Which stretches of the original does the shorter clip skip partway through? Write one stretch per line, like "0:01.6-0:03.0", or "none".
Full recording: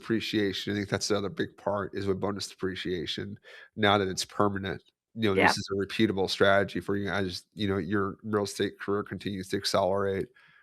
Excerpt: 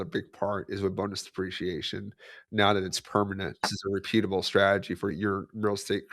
0:05.0-0:05.6
0:07.0-0:07.8